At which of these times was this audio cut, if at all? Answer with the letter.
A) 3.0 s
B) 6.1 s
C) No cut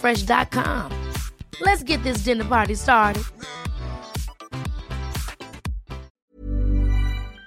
B